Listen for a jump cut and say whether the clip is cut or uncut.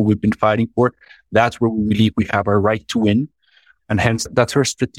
uncut